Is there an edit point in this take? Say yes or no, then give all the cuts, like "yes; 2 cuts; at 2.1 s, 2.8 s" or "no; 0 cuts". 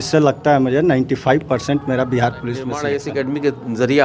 yes; 1 cut; at 2.8 s